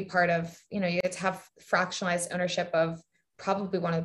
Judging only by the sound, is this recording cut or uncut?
cut